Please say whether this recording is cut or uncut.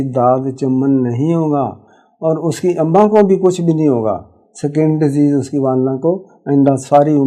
uncut